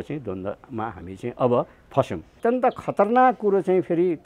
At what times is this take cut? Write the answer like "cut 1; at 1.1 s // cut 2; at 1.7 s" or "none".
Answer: cut 1; at 2.3 s